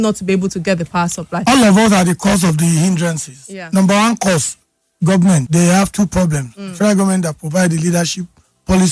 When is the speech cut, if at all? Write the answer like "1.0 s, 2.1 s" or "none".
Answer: 1.3 s, 5.5 s